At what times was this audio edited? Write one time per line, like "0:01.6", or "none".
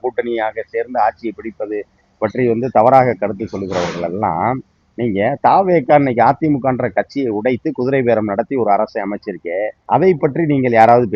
0:09.8